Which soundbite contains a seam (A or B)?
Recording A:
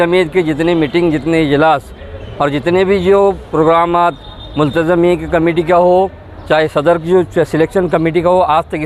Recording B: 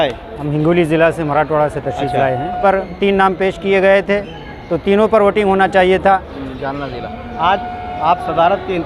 B